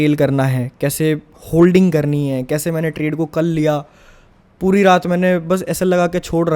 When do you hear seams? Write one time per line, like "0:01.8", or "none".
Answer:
none